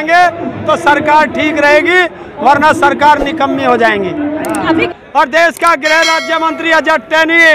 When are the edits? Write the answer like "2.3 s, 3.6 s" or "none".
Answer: 4.9 s